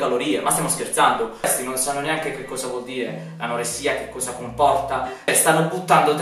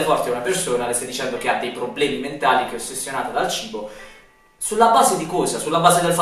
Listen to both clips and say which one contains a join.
first; 2 cuts; at 1.4 s, 5.3 s

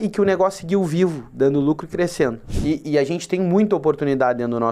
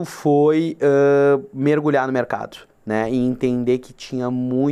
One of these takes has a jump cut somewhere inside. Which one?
first; 1 cut; at 2.4 s

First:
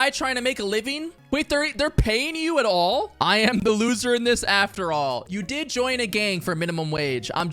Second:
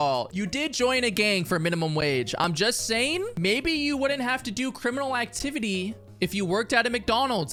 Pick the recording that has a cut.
first; 1 cut; at 3.1 s

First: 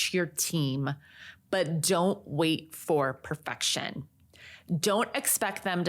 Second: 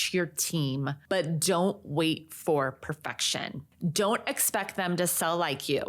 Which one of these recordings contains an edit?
second; 2 cuts; at 1.0 s, 3.6 s

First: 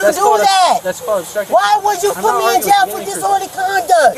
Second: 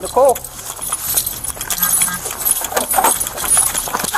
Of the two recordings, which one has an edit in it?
second; 1 cut; at 2.2 s

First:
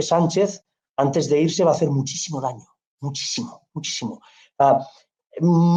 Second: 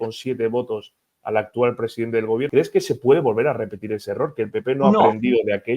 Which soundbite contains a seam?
second; 1 cut; at 2.5 s

